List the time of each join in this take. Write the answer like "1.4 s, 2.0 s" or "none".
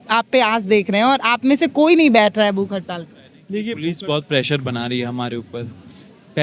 3.7 s